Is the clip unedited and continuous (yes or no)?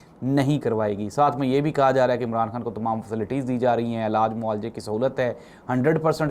yes